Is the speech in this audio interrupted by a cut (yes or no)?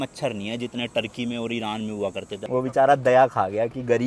yes